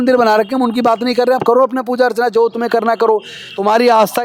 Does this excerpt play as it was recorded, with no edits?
yes; 0 cuts

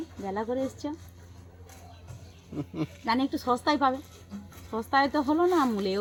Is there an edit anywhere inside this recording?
no; 0 cuts

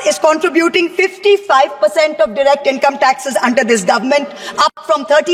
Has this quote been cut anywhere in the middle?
no; 0 cuts

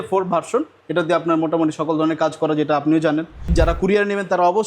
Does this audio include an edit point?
yes; 1 cut; at 3.5 s

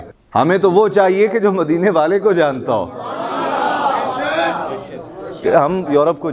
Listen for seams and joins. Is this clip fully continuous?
yes; 0 cuts

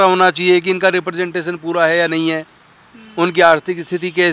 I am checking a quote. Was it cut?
no; 0 cuts

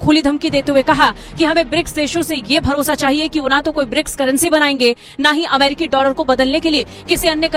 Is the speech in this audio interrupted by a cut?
no; 0 cuts

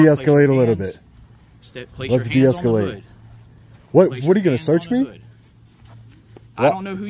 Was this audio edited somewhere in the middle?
no; 0 cuts

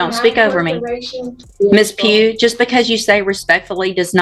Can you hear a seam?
yes; 1 cut; at 1.5 s

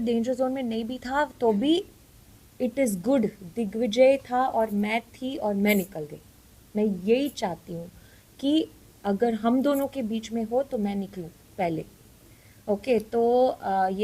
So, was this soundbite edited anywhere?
no; 0 cuts

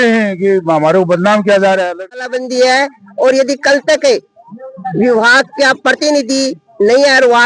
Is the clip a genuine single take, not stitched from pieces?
no; 1 cut; at 2.3 s

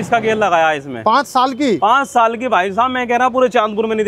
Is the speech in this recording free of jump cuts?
yes; 0 cuts

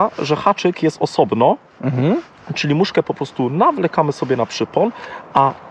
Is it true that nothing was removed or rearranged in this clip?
yes; 0 cuts

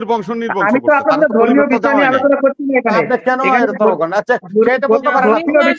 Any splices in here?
no; 0 cuts

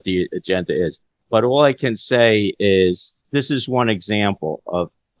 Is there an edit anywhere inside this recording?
yes; 2 cuts; at 1.2 s, 3.2 s

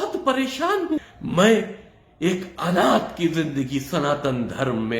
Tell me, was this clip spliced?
yes; 1 cut; at 1.0 s

